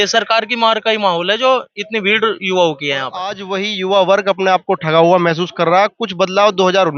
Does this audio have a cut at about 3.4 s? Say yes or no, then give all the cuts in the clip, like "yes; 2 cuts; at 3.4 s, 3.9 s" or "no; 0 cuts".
yes; 1 cut; at 3.4 s